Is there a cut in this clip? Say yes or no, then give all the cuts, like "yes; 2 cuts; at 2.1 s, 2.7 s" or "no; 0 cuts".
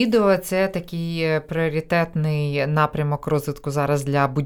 no; 0 cuts